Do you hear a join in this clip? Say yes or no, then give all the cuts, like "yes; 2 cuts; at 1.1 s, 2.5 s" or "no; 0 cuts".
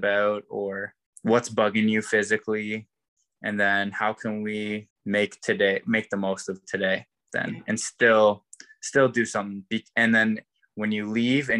yes; 2 cuts; at 1.1 s, 4.9 s